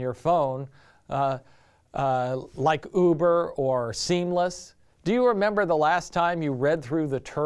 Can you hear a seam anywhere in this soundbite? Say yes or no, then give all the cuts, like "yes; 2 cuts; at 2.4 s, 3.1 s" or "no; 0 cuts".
yes; 1 cut; at 4.9 s